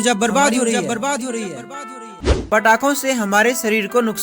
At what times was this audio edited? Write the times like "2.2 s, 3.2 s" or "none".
2.3 s